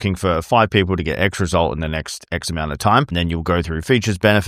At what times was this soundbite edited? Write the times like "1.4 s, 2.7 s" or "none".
3.1 s

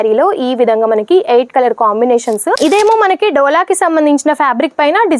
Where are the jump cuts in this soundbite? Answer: 2.6 s

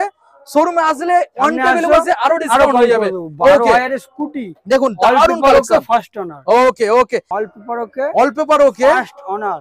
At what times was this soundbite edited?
7.3 s

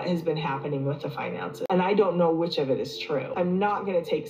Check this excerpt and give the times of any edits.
1.6 s, 3.3 s

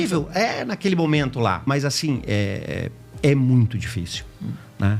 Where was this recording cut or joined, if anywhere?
1.6 s

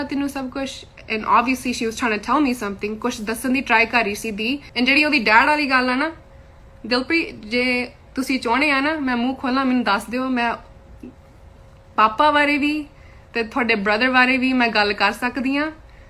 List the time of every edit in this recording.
4.7 s

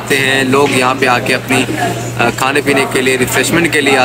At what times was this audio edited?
none

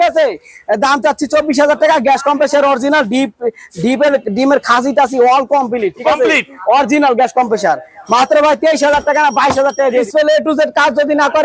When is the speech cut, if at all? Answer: 10.1 s

